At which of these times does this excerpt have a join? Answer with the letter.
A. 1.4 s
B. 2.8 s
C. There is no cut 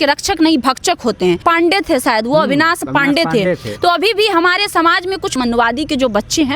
A